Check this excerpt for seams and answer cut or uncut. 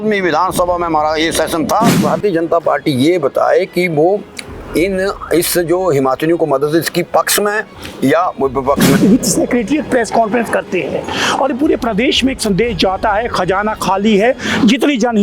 cut